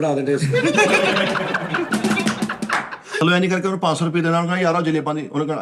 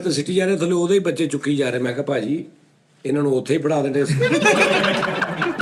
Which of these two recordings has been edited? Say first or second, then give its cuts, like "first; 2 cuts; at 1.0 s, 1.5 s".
first; 1 cut; at 3.2 s